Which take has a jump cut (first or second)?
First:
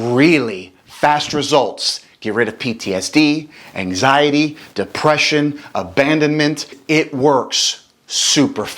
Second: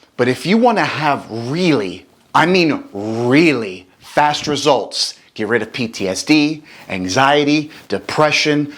first